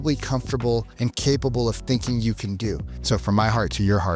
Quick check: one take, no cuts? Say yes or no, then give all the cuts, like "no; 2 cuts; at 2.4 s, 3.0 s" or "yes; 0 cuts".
no; 2 cuts; at 0.9 s, 2.9 s